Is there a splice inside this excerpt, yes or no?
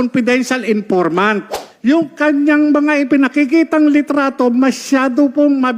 yes